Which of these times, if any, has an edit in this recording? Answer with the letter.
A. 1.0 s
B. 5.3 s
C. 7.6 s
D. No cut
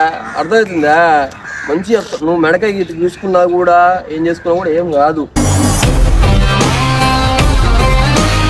B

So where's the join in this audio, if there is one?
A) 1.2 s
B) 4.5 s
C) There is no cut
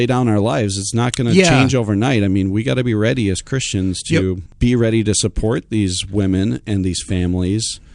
B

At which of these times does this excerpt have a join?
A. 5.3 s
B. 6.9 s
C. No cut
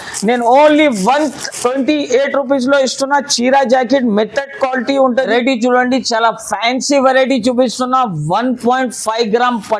A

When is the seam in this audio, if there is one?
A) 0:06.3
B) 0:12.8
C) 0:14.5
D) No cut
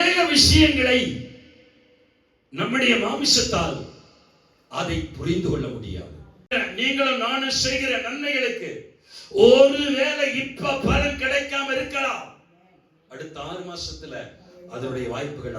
A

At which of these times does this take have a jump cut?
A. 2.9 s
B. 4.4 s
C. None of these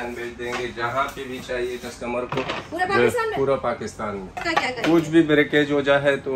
B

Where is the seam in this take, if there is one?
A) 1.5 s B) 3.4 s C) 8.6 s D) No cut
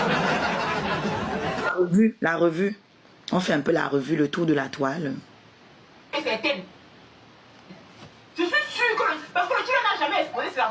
D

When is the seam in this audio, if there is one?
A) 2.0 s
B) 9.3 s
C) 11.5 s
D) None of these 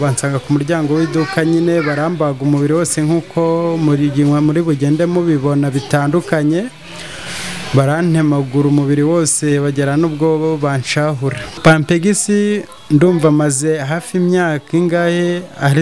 C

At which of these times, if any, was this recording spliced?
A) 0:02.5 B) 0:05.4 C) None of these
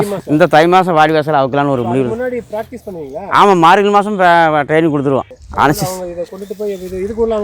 B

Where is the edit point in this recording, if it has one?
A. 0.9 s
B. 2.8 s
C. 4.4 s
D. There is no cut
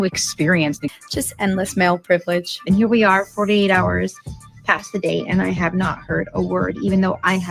A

